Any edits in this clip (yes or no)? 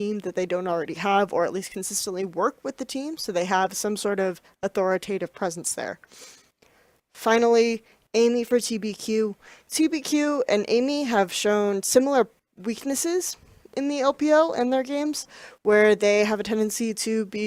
no